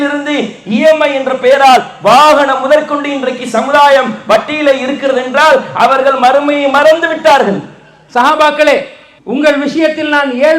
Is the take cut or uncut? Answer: cut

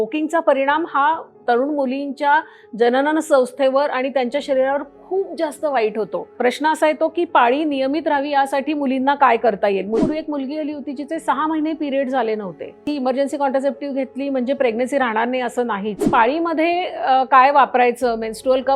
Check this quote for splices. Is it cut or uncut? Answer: cut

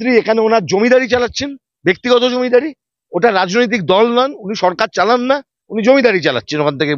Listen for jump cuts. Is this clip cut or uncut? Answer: uncut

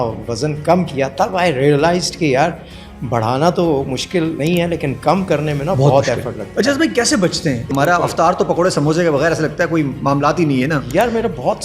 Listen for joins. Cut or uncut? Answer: cut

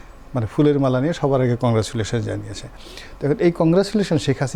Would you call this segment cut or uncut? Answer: uncut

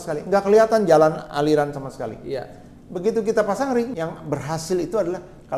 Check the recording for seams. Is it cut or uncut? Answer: cut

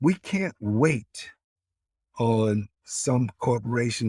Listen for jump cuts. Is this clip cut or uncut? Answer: cut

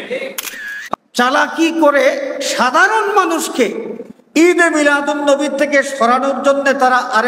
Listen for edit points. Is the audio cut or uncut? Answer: cut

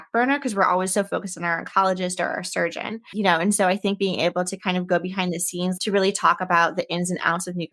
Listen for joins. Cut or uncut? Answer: cut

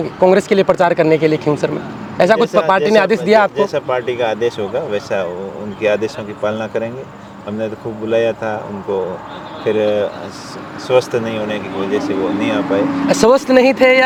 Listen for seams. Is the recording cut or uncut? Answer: uncut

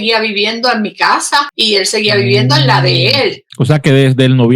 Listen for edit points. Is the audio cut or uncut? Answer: cut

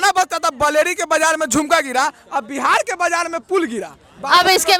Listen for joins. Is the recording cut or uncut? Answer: uncut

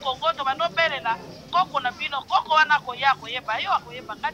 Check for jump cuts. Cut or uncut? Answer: uncut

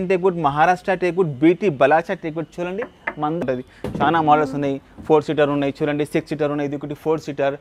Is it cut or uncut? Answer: cut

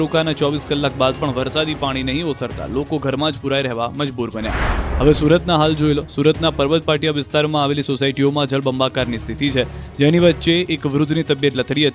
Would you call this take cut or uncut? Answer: cut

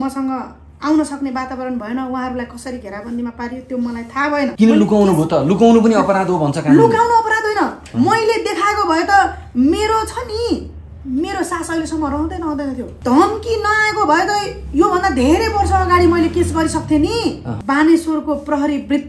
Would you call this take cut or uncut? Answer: cut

